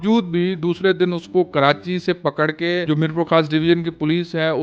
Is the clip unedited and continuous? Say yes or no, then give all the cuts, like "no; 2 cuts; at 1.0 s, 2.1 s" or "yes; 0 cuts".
no; 1 cut; at 2.8 s